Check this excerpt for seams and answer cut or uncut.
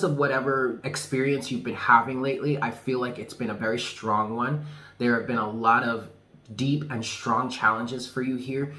cut